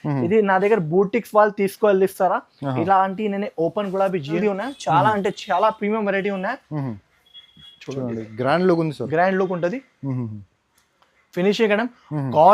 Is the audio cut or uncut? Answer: cut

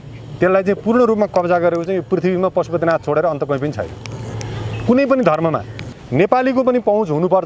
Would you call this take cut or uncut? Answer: cut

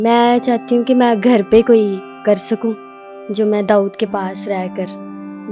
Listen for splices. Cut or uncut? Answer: uncut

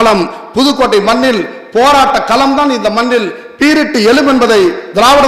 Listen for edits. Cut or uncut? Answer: uncut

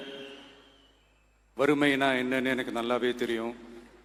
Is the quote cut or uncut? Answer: uncut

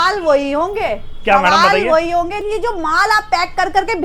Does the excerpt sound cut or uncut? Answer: cut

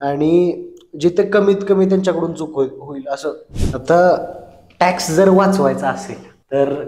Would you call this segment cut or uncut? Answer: cut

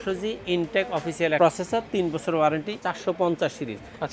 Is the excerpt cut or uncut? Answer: cut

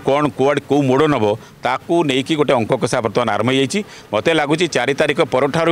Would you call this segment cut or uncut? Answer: uncut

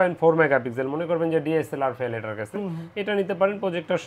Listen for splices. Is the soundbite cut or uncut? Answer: uncut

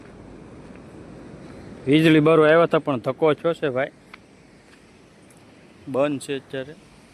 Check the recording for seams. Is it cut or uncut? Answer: uncut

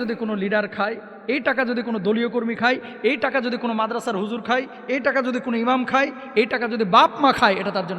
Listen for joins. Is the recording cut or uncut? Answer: uncut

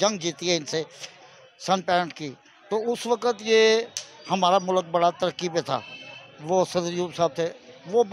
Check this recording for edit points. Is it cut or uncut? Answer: uncut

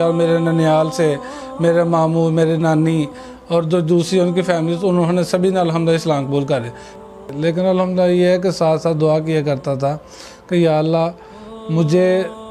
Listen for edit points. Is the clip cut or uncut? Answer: cut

